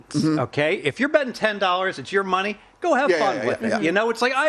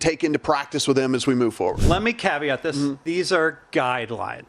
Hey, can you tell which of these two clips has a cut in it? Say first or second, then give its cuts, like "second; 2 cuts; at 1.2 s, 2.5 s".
second; 2 cuts; at 1.8 s, 3.0 s